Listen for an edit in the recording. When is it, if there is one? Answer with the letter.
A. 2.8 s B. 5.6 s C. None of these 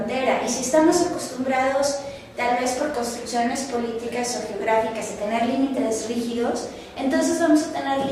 A